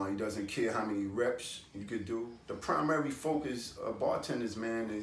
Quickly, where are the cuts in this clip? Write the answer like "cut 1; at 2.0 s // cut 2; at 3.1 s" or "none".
cut 1; at 2.4 s